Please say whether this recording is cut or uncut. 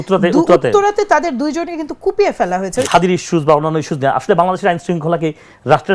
cut